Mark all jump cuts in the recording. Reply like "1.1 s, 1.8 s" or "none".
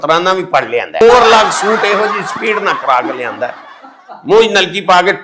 1.0 s